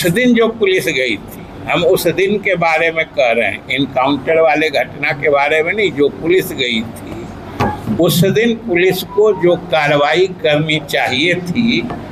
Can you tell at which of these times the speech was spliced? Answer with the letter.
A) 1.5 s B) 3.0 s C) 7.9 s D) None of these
D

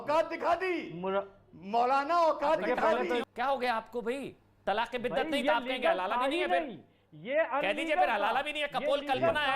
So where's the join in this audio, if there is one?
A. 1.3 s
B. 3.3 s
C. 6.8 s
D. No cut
B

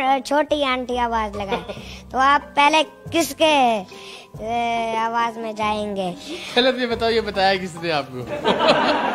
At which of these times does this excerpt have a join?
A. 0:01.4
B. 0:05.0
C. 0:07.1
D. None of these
D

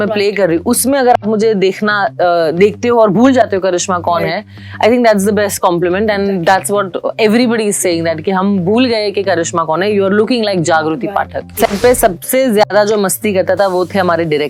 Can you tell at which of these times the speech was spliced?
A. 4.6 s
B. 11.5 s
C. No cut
B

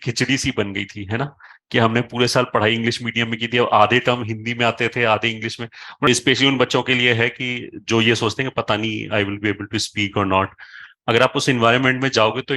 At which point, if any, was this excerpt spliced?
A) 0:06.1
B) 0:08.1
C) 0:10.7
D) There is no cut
A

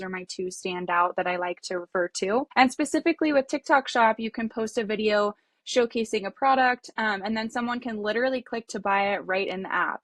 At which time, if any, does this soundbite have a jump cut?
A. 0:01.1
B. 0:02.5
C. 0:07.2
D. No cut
B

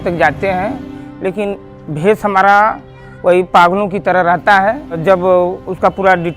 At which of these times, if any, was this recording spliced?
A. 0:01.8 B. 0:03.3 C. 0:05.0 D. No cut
C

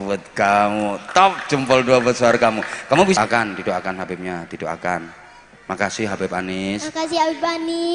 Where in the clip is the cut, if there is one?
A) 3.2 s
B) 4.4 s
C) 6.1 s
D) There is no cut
A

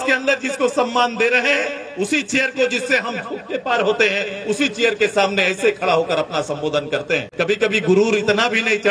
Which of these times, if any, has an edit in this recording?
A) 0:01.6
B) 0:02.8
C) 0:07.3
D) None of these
C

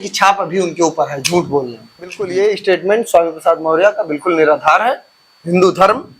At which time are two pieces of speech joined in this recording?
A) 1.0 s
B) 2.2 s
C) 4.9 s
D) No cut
B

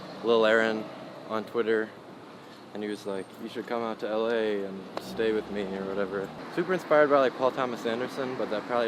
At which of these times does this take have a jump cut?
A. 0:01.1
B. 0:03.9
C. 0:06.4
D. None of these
C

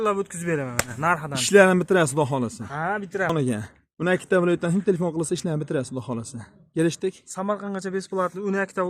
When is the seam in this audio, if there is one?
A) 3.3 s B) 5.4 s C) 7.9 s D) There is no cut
A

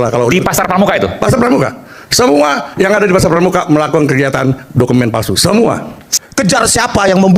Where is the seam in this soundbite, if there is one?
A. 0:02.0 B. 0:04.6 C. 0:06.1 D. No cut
C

